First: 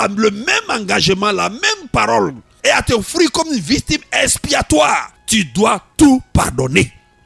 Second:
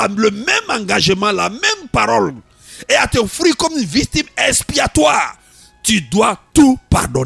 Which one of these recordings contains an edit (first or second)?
first